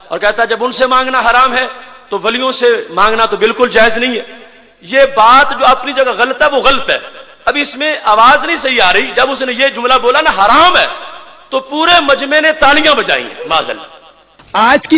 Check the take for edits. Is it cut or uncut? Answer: uncut